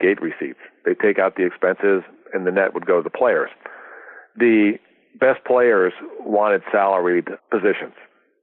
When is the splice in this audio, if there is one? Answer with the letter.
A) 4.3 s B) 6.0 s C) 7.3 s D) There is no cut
C